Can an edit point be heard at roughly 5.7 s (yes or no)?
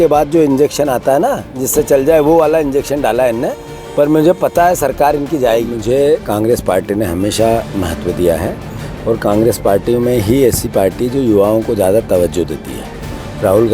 yes